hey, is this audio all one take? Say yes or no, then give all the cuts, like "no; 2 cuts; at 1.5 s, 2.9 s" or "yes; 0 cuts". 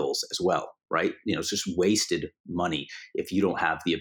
yes; 0 cuts